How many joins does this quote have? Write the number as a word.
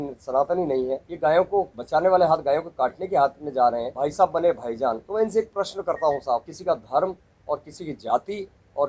five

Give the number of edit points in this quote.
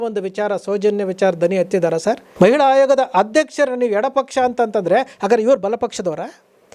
one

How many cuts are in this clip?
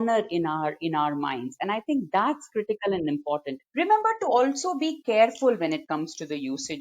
one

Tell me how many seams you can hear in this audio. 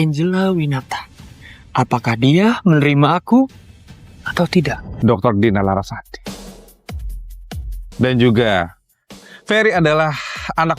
two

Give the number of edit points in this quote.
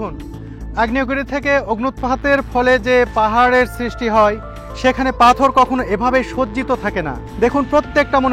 one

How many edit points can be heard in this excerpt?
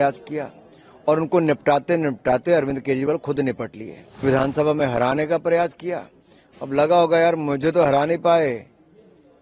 one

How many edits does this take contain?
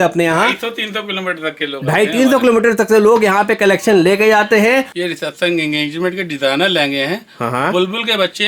one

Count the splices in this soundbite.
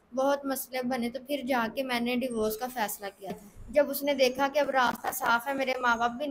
one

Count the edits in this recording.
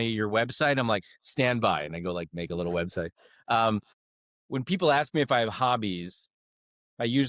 one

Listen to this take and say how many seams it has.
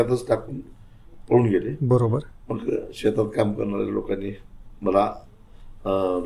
zero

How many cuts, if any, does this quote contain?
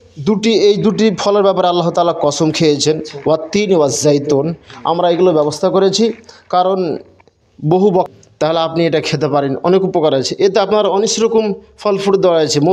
one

